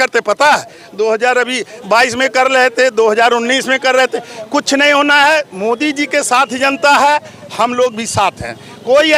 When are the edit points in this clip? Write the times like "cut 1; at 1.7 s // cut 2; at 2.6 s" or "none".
none